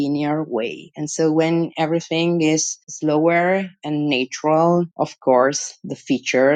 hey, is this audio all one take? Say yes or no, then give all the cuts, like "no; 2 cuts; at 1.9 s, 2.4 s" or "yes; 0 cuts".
yes; 0 cuts